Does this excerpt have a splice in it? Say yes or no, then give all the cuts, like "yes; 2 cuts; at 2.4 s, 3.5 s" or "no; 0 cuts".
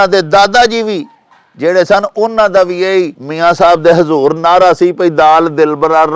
yes; 1 cut; at 3.2 s